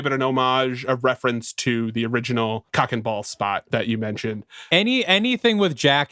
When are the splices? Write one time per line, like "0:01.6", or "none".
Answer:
0:03.7